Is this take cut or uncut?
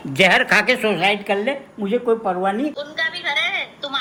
uncut